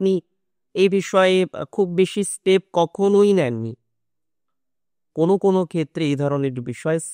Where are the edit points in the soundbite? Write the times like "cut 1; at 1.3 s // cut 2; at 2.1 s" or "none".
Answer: none